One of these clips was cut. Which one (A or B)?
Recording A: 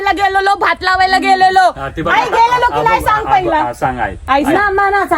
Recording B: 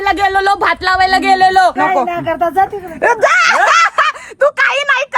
B